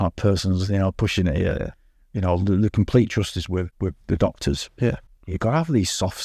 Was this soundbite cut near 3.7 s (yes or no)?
yes